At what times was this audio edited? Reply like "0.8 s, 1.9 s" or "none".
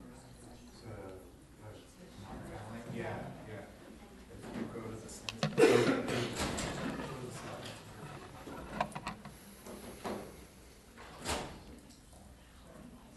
5.5 s